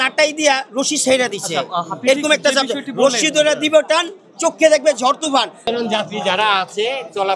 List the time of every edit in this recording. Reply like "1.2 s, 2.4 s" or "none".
5.6 s

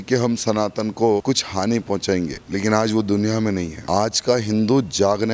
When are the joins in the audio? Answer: 1.2 s, 2.4 s, 3.7 s

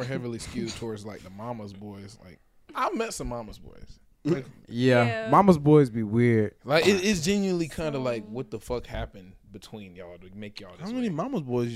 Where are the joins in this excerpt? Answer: none

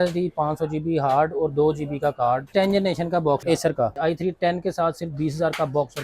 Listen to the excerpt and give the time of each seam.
2.5 s, 4.0 s

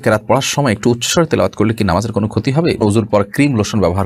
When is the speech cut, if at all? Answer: 2.8 s

